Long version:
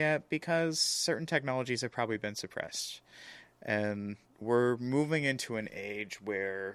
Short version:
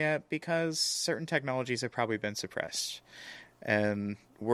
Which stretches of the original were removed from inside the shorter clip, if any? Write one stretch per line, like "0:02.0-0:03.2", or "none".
none

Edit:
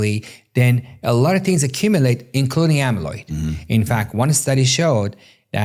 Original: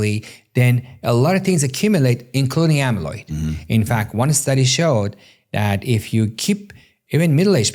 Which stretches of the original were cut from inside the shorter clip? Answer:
none

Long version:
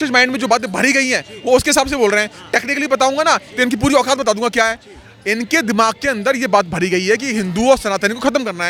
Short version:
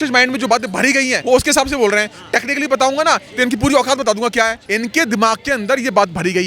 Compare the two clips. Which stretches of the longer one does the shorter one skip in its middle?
0:01.2-0:01.4
0:04.8-0:05.2

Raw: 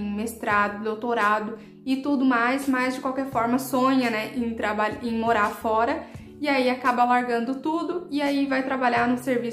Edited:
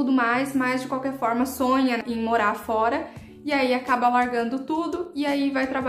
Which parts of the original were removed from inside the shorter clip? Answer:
0:04.1-0:05.0

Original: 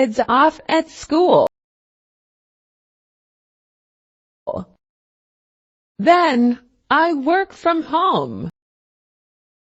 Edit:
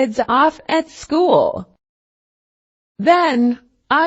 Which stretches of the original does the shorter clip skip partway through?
0:01.5-0:04.5

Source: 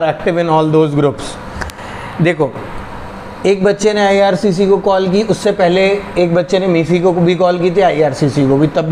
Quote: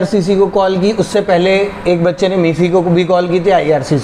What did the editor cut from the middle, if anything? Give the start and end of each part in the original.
none

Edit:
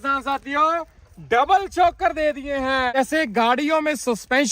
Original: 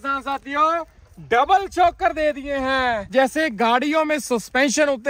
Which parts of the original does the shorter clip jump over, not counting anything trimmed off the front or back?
0:03.0-0:03.2

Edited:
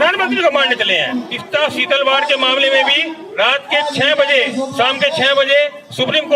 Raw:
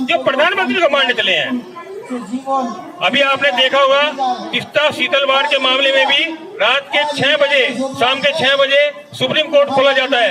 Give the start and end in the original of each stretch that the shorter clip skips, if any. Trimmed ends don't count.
0:01.7-0:04.6

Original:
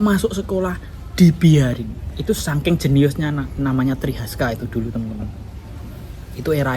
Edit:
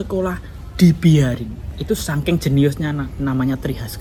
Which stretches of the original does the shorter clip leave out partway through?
none

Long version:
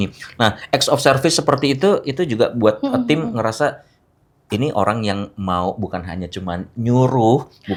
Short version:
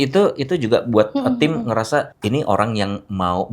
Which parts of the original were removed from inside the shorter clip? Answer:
0:03.8-0:04.4

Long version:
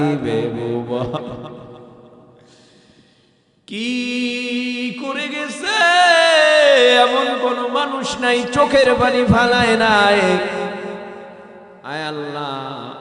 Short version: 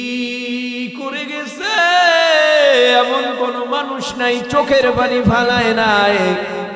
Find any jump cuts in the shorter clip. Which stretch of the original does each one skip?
none

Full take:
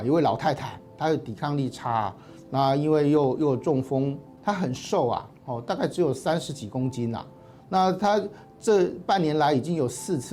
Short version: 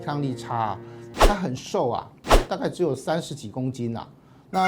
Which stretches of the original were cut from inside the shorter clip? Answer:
0:02.4-0:04.2

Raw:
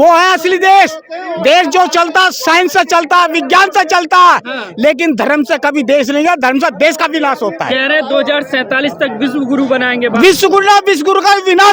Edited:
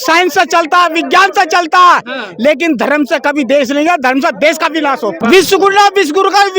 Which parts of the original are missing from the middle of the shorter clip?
0:07.6-0:10.1

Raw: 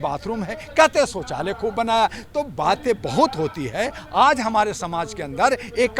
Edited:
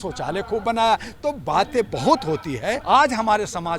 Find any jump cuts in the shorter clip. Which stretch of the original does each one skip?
0:03.9-0:04.1

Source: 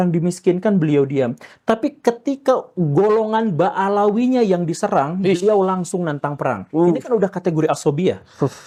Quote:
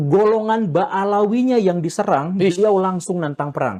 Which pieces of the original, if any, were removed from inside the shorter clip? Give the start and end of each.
none

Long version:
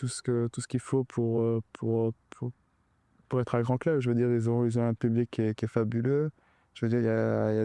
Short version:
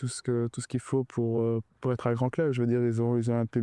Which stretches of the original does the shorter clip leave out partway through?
0:01.7-0:03.2

